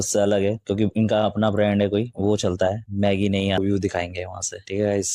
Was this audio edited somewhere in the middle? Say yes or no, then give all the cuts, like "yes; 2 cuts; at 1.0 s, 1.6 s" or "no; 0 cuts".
yes; 1 cut; at 3.6 s